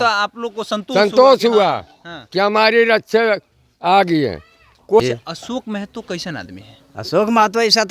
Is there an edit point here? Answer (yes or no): yes